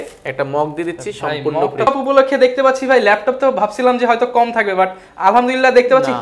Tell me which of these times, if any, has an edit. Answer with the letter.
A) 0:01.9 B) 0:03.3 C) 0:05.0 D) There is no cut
A